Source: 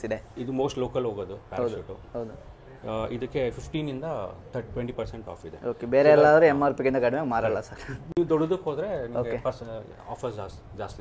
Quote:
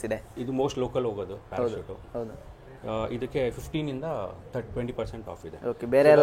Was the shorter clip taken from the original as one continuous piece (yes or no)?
yes